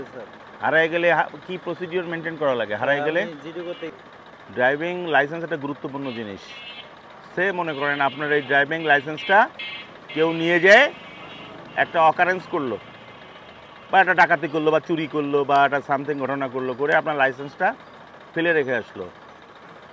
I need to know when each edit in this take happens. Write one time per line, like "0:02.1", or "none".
0:03.9